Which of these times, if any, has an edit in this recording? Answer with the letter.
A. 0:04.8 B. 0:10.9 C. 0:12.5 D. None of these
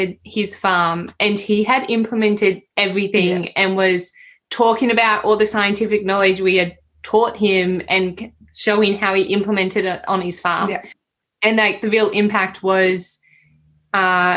B